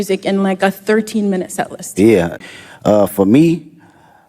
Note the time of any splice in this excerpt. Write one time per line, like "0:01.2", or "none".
0:02.4